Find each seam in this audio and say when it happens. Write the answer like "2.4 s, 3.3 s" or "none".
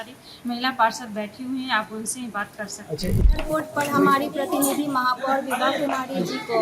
3.2 s